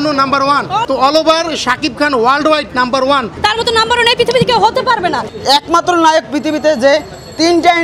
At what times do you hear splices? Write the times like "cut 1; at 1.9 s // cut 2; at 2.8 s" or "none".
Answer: cut 1; at 0.8 s // cut 2; at 3.3 s // cut 3; at 5.3 s